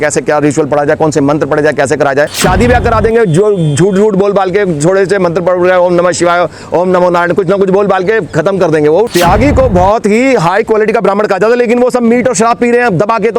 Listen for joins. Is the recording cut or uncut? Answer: cut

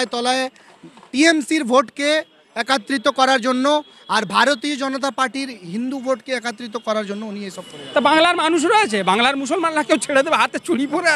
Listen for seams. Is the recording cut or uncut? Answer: cut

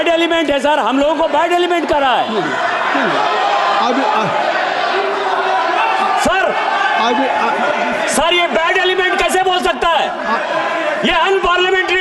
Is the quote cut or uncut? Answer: uncut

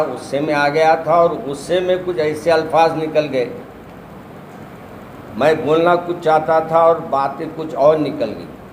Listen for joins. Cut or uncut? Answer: uncut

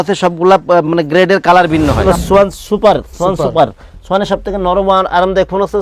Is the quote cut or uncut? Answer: cut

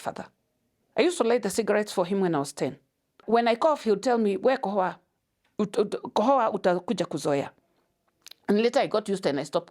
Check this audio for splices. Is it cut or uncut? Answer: cut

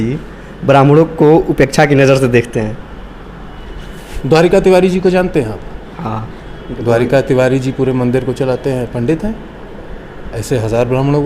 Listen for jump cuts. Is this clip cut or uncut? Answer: uncut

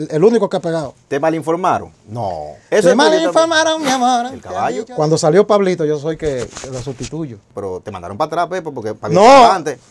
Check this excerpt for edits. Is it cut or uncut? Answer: cut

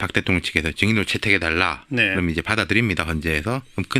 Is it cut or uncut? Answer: cut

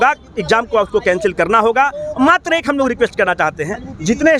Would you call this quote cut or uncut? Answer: uncut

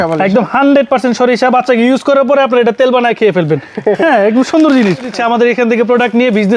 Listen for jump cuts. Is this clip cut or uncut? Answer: cut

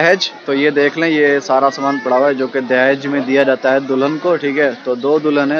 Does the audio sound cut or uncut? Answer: uncut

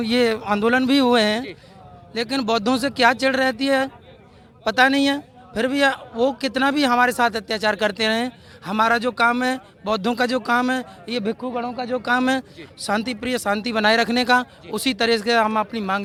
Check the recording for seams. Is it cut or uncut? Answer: uncut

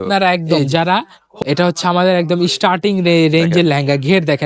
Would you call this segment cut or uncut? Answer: cut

